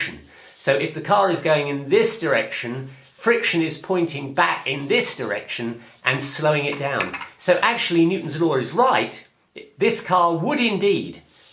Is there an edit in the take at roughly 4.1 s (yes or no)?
yes